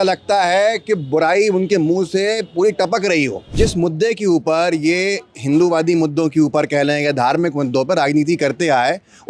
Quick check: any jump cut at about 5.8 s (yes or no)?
no